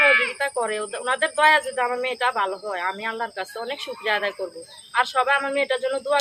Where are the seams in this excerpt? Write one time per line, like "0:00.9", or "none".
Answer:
0:00.9